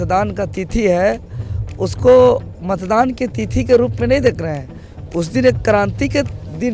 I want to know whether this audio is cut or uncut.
uncut